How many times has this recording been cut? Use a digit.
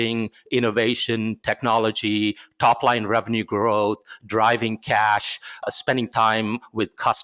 1